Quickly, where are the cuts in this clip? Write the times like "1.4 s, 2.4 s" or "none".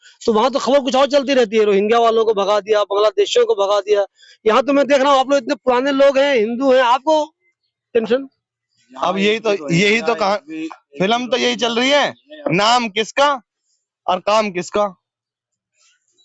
none